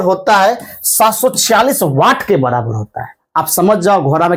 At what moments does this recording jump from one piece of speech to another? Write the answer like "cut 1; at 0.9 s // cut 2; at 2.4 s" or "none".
none